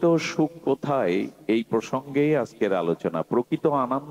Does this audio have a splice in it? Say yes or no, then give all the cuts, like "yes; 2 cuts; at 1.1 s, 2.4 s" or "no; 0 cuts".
no; 0 cuts